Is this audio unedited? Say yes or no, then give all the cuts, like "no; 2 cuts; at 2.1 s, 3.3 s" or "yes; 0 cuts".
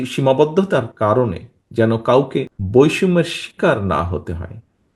no; 1 cut; at 2.6 s